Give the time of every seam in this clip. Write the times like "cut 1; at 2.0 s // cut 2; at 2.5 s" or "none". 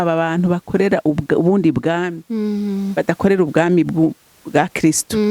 none